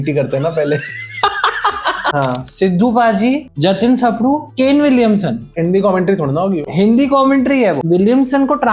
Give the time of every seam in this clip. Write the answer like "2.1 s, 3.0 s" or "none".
2.1 s, 4.5 s, 5.4 s, 7.8 s